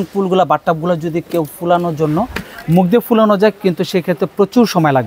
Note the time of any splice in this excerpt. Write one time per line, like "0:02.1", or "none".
none